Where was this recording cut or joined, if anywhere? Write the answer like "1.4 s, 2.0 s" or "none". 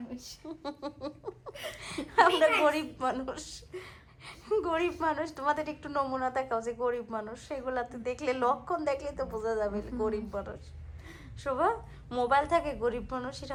none